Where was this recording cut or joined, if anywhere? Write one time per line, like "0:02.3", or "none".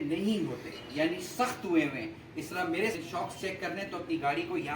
0:03.0